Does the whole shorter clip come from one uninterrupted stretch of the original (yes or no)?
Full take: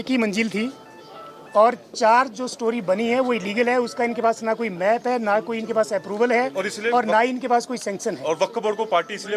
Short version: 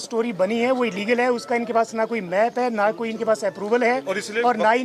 yes